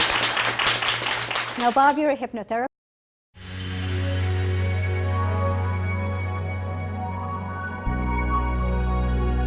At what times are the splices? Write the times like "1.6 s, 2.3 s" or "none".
none

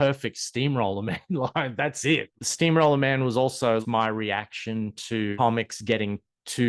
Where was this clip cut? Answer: 2.3 s, 3.8 s, 5.3 s

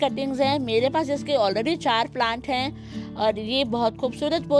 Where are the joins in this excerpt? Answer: none

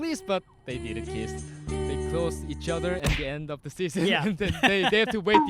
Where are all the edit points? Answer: none

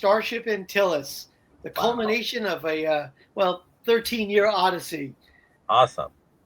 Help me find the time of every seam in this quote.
5.5 s

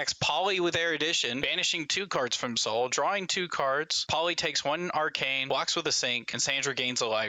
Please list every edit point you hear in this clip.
1.5 s, 4.0 s, 5.4 s, 6.3 s

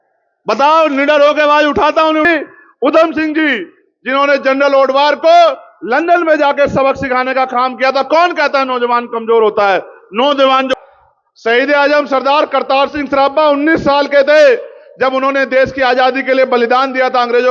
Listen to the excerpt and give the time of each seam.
2.3 s, 10.7 s

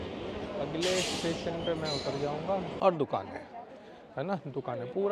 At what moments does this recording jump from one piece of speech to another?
2.7 s

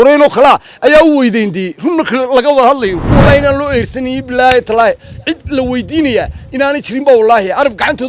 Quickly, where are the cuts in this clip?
3.1 s

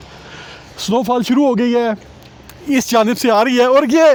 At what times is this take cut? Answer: none

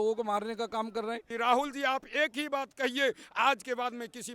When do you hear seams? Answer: 1.2 s

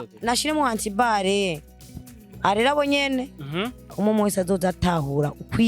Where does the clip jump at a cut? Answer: 3.9 s

